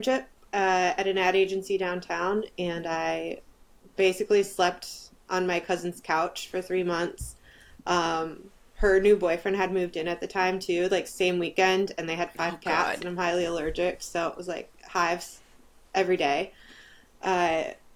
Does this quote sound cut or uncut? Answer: uncut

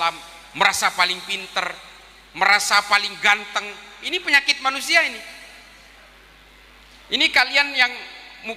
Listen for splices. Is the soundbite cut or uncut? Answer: uncut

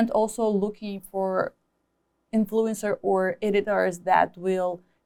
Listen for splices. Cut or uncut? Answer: uncut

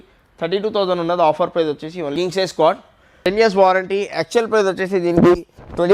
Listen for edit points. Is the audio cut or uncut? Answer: cut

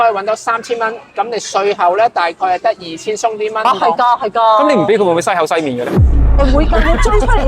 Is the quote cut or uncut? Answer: cut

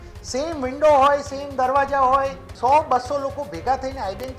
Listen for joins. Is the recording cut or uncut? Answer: cut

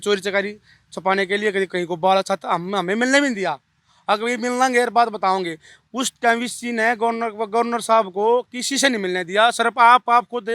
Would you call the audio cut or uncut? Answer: uncut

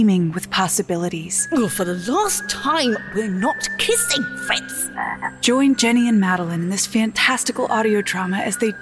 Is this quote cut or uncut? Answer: cut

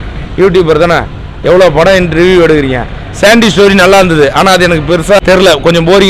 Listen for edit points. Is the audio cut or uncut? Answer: cut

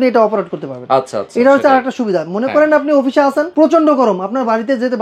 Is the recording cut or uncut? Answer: cut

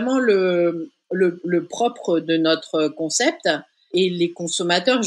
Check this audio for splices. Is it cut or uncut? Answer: cut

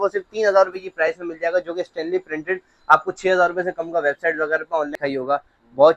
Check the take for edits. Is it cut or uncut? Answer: cut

